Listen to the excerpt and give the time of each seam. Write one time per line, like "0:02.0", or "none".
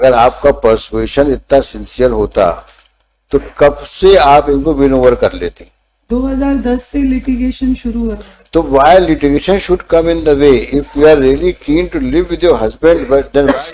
none